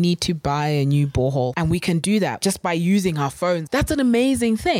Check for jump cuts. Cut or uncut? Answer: cut